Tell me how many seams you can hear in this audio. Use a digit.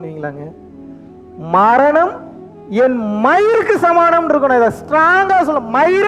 0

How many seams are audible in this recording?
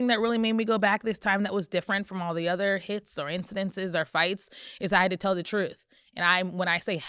0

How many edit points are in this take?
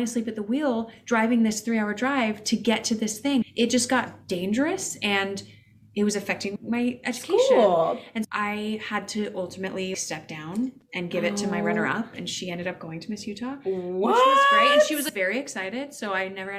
2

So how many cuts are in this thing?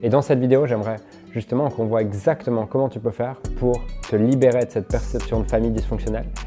0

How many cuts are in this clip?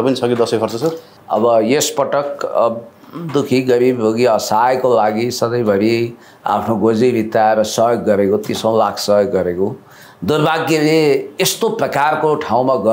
1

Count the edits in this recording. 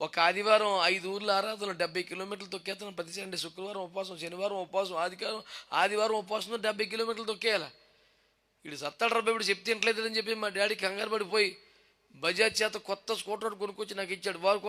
0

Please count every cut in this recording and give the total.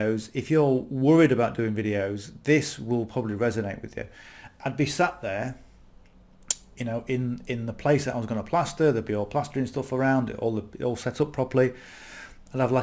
0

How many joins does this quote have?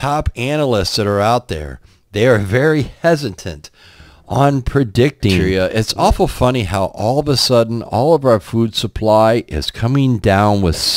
1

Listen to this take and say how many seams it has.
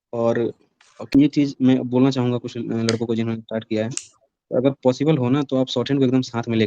1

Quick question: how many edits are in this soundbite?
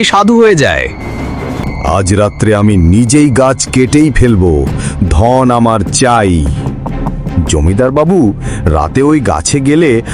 1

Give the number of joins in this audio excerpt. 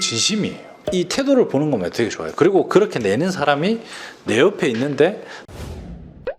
1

